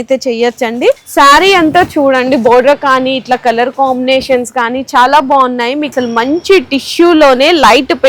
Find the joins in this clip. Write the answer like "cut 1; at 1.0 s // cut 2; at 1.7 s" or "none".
cut 1; at 1.0 s // cut 2; at 5.9 s